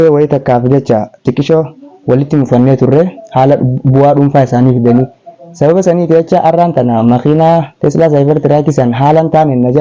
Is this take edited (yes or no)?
yes